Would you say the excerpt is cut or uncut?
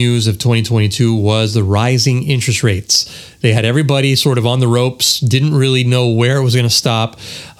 uncut